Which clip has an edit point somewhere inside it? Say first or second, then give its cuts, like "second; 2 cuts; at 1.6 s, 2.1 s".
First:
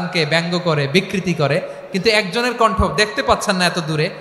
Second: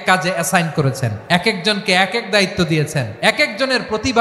second; 2 cuts; at 1.1 s, 3.1 s